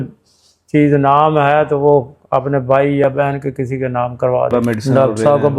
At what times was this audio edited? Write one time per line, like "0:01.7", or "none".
0:04.5